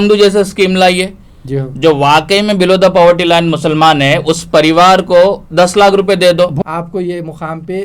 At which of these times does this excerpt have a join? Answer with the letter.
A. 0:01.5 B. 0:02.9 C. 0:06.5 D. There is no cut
C